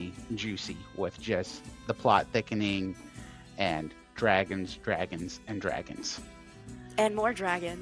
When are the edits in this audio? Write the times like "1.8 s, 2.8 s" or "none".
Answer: none